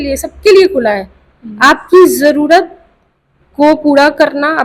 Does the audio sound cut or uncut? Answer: uncut